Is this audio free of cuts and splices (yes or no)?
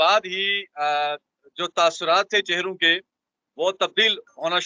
yes